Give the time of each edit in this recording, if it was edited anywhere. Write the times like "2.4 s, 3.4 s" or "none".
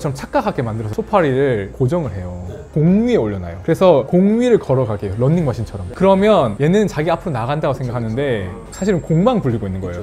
0.9 s, 2.7 s, 5.8 s